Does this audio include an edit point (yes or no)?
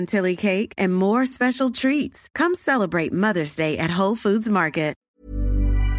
yes